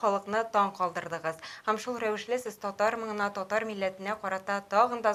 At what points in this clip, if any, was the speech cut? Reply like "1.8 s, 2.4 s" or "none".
none